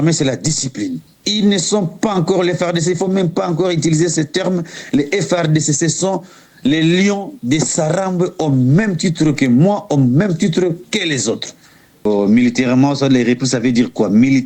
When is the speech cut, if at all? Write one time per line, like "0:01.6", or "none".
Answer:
0:12.1